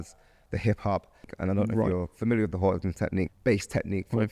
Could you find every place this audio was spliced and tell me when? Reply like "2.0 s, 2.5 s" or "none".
1.3 s, 3.3 s